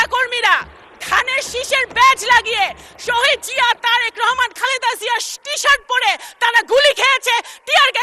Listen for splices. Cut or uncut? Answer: uncut